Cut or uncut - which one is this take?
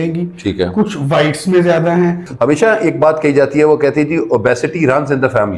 cut